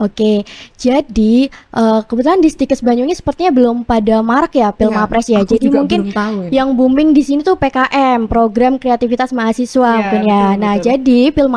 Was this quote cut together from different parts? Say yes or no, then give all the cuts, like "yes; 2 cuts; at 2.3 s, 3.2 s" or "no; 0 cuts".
no; 0 cuts